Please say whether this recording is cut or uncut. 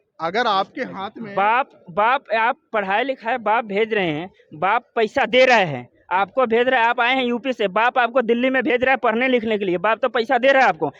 uncut